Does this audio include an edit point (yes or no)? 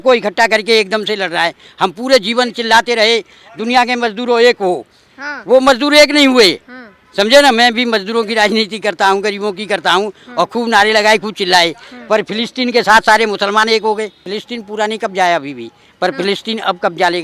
yes